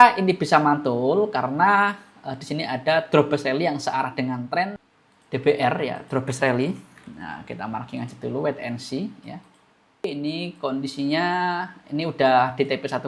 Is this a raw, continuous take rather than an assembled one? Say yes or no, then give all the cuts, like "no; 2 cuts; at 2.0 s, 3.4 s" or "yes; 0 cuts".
no; 2 cuts; at 4.8 s, 10.1 s